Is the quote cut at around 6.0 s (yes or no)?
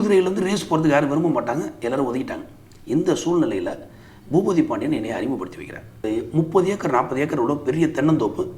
yes